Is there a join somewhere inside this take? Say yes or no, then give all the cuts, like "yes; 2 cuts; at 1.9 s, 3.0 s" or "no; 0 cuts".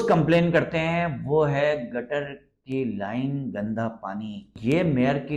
yes; 1 cut; at 4.4 s